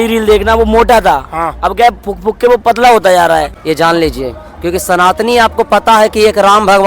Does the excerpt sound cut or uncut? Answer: cut